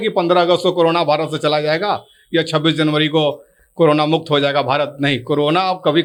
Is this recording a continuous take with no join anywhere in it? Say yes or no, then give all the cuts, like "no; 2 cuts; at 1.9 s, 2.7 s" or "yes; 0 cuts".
yes; 0 cuts